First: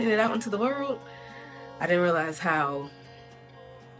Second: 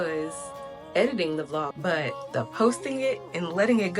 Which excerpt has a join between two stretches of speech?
second; 1 cut; at 1.7 s

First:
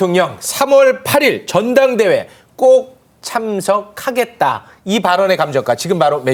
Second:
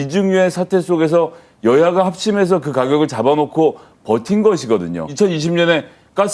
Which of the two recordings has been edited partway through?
second; 1 cut; at 5.1 s

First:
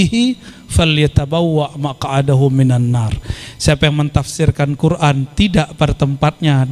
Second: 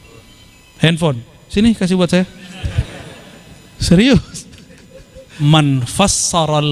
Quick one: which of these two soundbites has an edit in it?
second; 1 cut; at 5.3 s

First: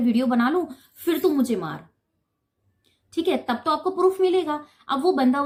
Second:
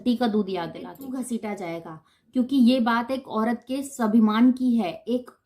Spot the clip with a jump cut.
second; 1 cut; at 1.0 s

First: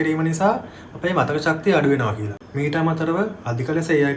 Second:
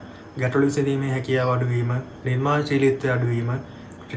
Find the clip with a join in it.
first; 1 cut; at 2.4 s

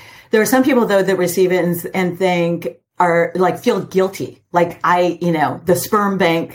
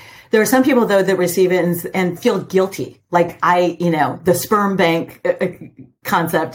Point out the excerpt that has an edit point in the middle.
second; 1 cut; at 2.2 s

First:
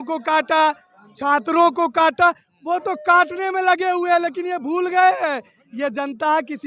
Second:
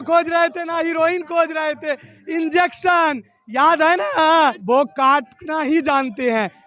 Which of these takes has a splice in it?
second; 1 cut; at 4.6 s

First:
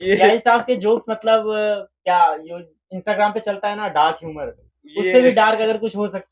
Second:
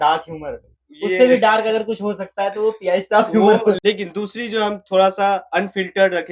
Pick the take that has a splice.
second; 1 cut; at 3.8 s

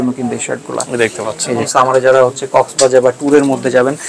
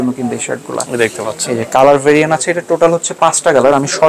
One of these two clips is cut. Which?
first; 1 cut; at 1.6 s

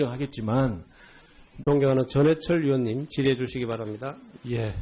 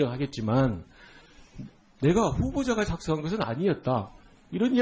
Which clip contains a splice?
second; 1 cut; at 1.6 s

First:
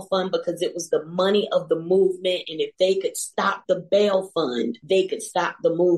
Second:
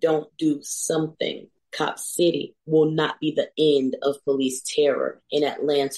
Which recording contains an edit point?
first; 1 cut; at 4.8 s

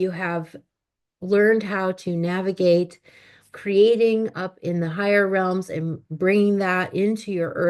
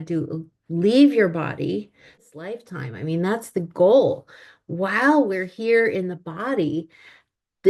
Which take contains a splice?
second; 1 cut; at 2.2 s

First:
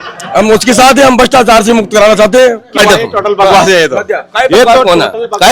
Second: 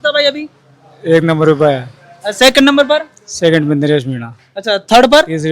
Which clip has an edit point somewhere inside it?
first; 1 cut; at 2.8 s

